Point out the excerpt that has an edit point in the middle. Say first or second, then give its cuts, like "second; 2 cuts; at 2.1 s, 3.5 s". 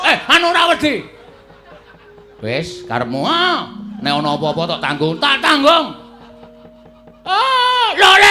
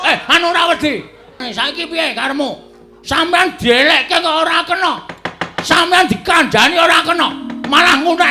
second; 1 cut; at 1.4 s